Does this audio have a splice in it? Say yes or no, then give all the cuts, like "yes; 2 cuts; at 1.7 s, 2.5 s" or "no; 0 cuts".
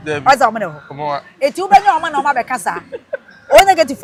no; 0 cuts